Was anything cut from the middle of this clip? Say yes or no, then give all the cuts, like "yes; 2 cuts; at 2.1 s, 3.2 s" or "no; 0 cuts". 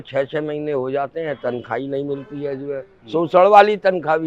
no; 0 cuts